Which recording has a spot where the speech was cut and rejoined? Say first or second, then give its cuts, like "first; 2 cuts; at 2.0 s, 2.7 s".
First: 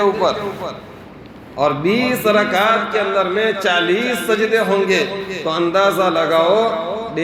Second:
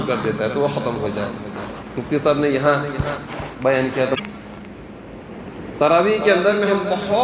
second; 1 cut; at 4.2 s